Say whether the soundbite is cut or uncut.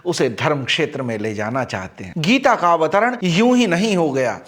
uncut